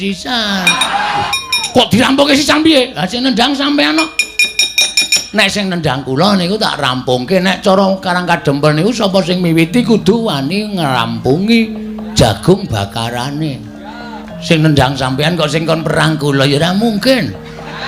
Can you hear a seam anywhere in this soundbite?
yes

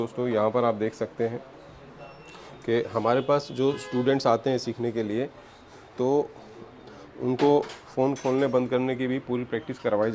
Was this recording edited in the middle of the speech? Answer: no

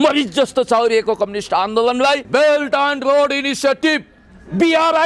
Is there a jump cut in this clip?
yes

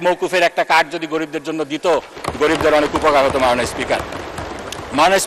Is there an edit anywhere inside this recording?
no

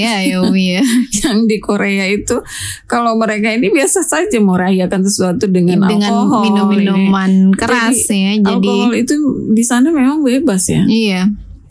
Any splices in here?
no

